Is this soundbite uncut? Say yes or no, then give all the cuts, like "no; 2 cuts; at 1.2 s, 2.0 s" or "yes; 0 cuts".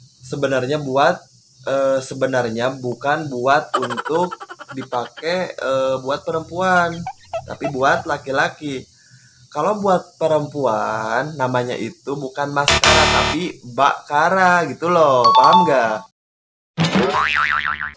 yes; 0 cuts